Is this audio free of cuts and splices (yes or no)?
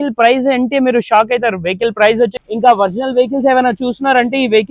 no